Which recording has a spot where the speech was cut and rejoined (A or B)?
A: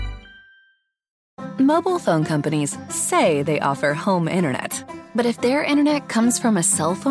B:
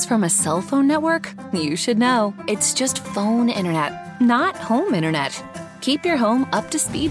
A